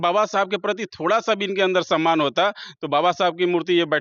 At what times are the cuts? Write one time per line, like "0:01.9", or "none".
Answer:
none

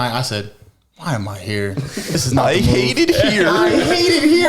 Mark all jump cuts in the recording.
0:02.1

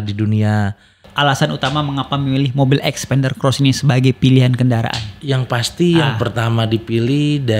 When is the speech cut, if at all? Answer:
0:01.1

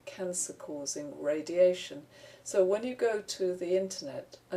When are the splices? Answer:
0:02.0

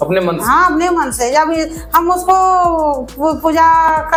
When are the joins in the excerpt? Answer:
none

